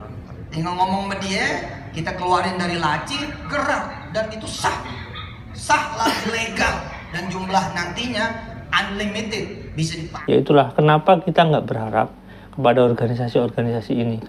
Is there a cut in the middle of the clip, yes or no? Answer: yes